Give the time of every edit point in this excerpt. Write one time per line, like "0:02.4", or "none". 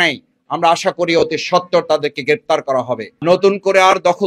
0:03.0